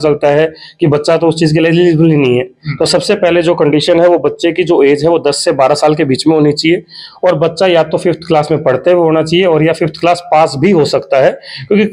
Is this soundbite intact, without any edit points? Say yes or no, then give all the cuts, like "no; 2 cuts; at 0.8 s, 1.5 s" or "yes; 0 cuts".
yes; 0 cuts